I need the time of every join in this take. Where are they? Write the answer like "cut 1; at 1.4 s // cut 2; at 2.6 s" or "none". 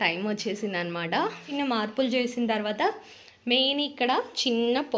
cut 1; at 1.5 s